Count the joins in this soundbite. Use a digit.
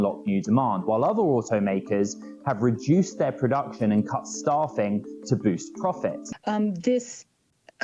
1